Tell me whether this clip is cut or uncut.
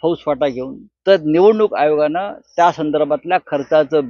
uncut